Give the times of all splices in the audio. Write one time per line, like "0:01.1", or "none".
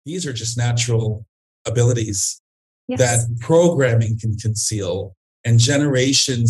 none